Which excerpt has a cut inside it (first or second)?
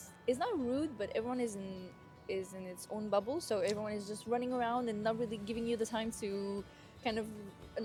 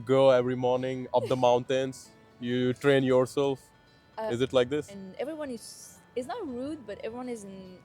second